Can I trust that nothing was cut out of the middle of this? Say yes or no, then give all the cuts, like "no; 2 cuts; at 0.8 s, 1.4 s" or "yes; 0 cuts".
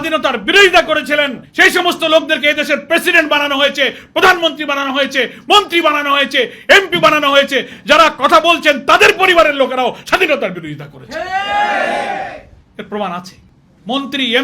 yes; 0 cuts